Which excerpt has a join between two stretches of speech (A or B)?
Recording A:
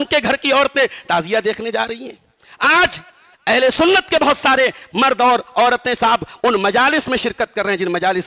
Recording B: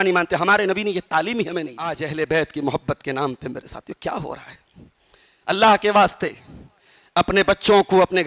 B